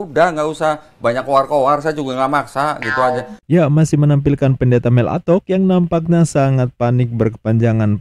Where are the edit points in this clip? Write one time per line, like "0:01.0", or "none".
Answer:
none